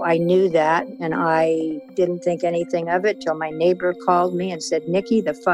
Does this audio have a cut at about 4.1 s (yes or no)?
no